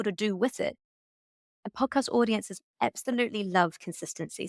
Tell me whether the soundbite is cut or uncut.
cut